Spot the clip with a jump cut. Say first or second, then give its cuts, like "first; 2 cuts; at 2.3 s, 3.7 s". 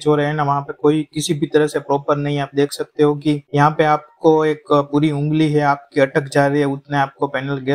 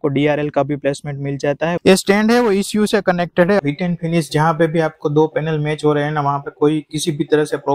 second; 2 cuts; at 1.8 s, 3.6 s